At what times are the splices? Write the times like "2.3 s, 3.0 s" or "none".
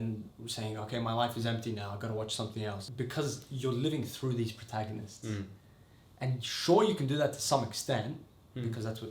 2.8 s